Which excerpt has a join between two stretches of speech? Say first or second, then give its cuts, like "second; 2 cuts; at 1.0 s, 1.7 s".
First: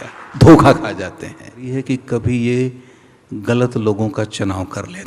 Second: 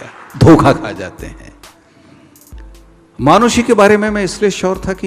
first; 1 cut; at 1.7 s